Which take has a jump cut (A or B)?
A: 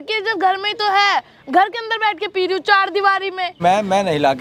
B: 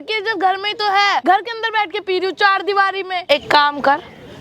B